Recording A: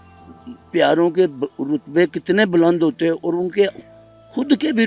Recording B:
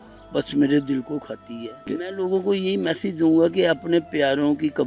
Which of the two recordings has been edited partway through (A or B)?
B